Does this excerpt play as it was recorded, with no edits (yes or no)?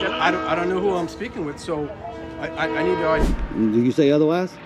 no